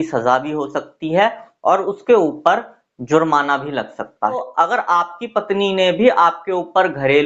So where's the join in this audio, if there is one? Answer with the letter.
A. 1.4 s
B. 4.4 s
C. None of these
B